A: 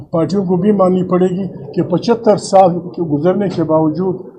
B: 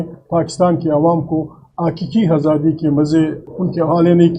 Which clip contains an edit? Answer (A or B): B